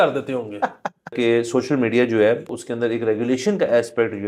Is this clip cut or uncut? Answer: cut